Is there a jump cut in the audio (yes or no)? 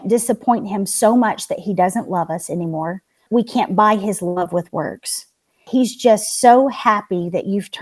yes